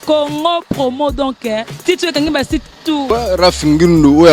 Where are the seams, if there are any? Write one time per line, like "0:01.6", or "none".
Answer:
0:03.0